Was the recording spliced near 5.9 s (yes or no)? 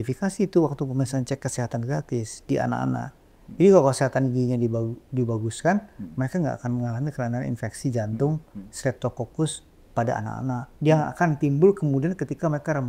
no